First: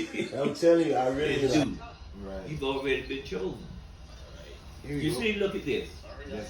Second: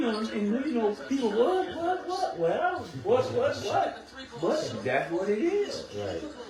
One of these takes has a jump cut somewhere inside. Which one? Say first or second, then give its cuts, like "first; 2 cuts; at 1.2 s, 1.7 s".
first; 1 cut; at 1.5 s